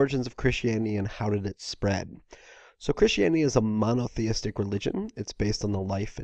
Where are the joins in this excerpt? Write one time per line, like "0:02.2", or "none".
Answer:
0:03.3